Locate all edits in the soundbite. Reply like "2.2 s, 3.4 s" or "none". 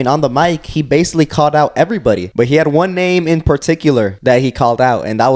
2.3 s, 4.1 s